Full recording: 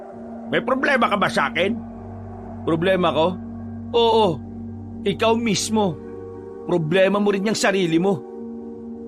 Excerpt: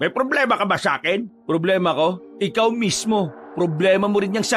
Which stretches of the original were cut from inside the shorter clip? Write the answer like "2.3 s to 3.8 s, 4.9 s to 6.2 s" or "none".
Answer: 1.8 s to 2.5 s, 3.4 s to 4.9 s, 6.1 s to 6.5 s